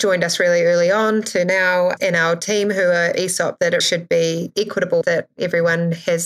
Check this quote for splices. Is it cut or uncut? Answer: cut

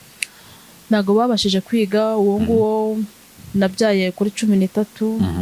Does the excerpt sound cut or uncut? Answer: uncut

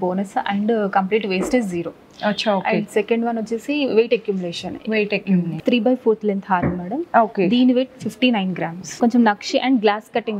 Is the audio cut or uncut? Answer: cut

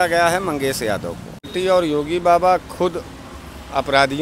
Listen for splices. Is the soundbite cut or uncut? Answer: cut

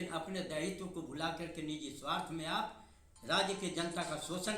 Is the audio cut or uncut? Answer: uncut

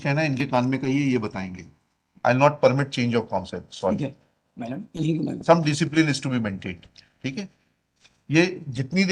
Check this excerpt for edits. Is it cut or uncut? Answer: uncut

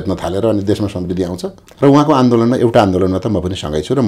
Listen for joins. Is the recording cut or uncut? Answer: cut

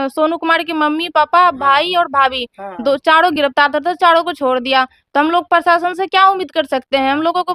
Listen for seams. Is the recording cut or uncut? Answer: uncut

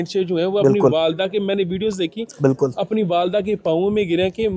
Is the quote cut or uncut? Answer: uncut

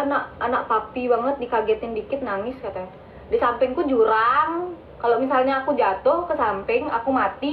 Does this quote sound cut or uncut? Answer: uncut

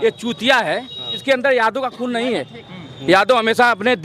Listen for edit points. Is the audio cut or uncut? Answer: cut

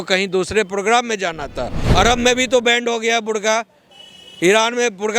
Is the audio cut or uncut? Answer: cut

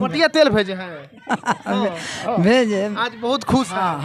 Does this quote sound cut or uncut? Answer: uncut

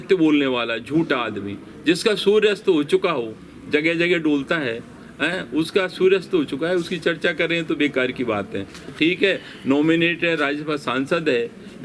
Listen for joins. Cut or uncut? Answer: cut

